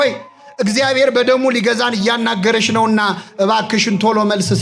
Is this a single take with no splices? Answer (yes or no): yes